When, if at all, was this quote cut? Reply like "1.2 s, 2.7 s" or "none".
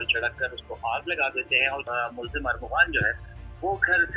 1.9 s